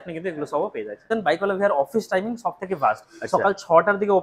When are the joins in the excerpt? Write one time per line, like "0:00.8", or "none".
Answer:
0:01.1